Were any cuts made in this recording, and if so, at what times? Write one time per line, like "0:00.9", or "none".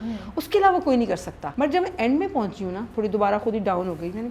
0:01.4
0:02.8